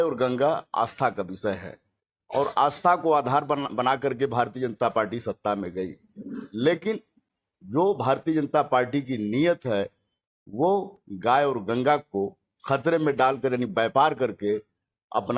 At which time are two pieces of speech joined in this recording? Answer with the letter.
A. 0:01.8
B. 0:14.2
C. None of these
C